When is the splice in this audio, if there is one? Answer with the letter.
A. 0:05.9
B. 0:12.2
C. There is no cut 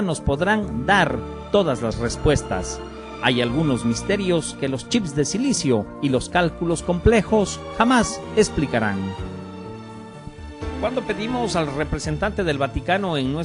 A